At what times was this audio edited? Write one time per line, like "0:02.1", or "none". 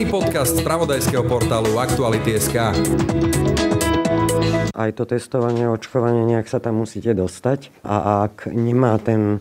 0:04.7
0:07.7